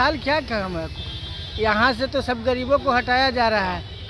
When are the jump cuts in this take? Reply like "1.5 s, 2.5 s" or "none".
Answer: none